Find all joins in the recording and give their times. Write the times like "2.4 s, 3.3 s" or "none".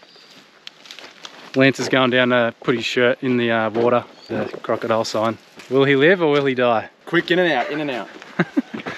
1.5 s, 7.0 s